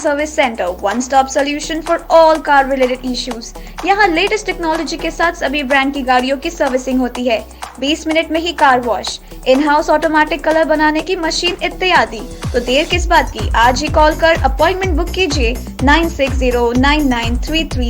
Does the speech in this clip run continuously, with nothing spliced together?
yes; 0 cuts

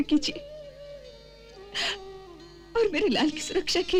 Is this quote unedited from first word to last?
yes; 0 cuts

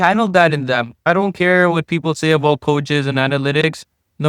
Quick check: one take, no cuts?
no; 1 cut; at 0.9 s

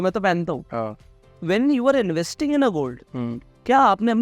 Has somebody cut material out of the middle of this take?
yes; 1 cut; at 1.0 s

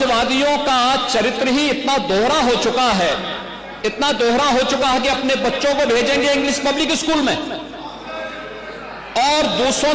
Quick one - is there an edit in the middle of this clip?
no; 0 cuts

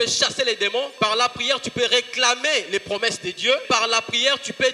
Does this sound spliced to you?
yes; 2 cuts; at 0.9 s, 3.7 s

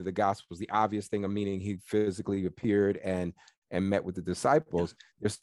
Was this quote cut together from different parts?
no; 0 cuts

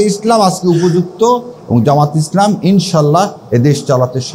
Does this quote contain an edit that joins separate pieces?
no; 0 cuts

